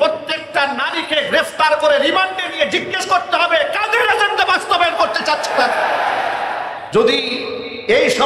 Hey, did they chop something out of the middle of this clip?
yes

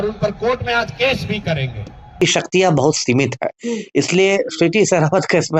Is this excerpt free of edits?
no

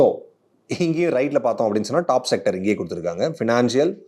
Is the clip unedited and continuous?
yes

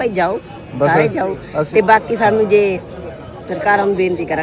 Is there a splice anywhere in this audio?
no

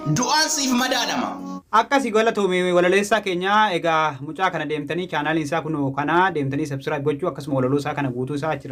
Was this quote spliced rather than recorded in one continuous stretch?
no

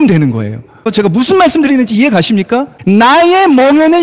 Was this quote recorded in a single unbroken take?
no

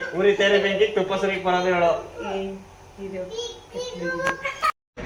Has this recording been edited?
no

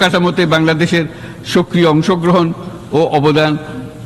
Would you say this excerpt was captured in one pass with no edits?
yes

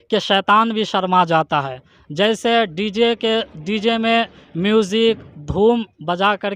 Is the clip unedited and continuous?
yes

